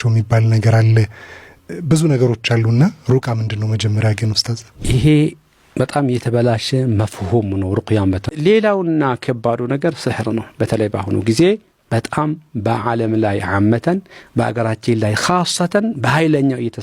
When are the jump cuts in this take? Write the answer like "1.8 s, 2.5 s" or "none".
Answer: 8.3 s

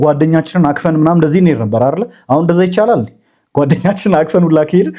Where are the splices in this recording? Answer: none

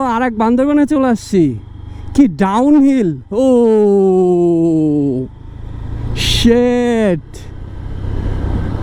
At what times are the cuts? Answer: none

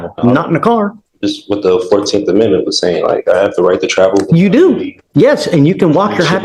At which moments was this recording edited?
none

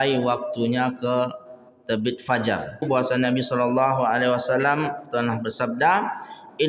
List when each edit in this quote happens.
2.9 s

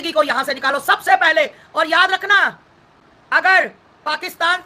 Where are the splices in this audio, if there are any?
none

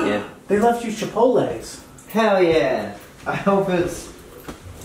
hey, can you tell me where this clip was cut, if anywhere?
none

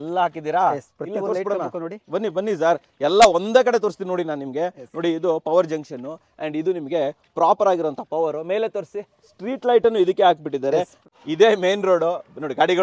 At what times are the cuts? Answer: 11.1 s

